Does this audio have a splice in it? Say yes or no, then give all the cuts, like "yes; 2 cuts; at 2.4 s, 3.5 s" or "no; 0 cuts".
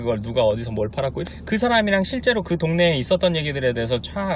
yes; 1 cut; at 1.2 s